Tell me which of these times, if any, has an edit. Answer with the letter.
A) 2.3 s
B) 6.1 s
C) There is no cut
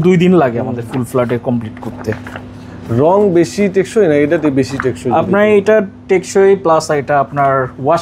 C